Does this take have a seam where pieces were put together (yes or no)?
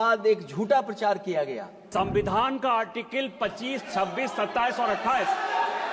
yes